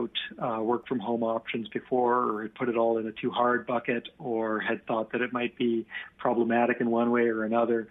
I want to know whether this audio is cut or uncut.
uncut